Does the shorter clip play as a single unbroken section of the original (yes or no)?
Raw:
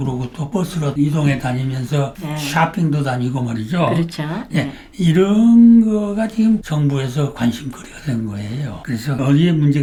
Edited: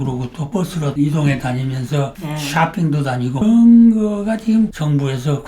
no